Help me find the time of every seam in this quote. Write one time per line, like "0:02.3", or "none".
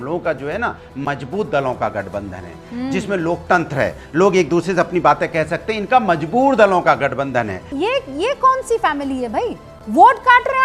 0:07.7